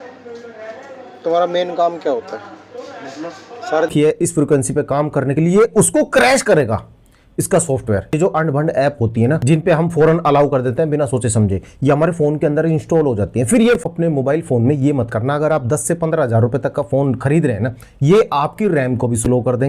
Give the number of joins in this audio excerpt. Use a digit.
2